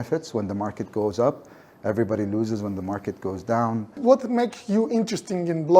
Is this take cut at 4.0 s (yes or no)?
yes